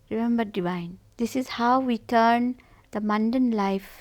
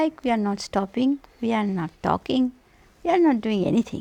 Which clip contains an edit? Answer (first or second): first